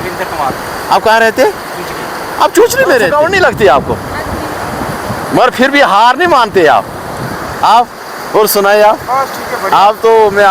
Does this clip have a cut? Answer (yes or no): yes